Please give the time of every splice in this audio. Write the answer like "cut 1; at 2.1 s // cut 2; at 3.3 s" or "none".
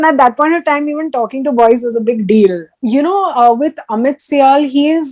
cut 1; at 2.7 s